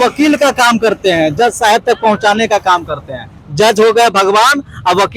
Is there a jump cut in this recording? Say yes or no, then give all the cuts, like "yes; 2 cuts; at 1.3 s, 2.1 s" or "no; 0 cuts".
no; 0 cuts